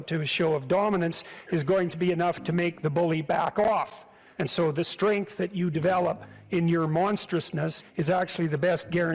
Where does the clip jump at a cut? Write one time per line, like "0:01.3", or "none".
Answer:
0:03.6
0:06.3
0:08.2

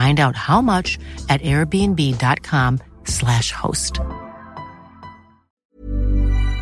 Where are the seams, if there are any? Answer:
0:05.6

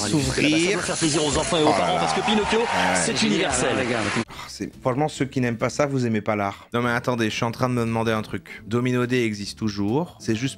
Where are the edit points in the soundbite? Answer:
0:04.3
0:06.6

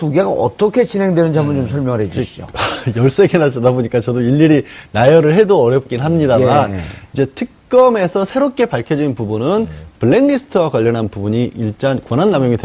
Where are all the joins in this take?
none

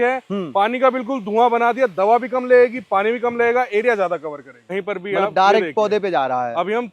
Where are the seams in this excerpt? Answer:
0:04.6

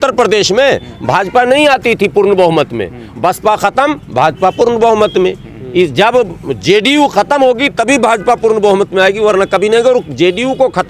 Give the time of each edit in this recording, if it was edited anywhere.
none

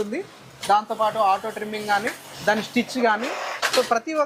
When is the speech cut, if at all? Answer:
none

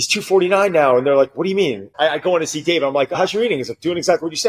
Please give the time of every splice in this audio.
0:01.9

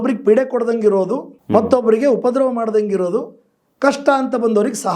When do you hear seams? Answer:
0:01.3

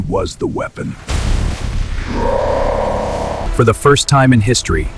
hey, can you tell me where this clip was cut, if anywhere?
0:03.4

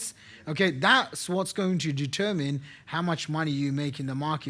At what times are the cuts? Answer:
none

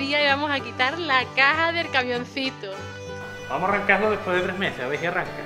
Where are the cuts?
0:03.3

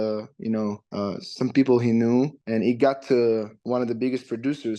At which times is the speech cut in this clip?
0:00.8
0:02.4
0:03.5

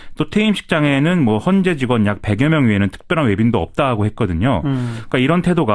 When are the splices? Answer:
0:03.7

